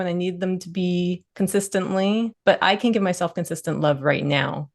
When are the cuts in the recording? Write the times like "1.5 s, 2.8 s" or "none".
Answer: 1.3 s, 2.3 s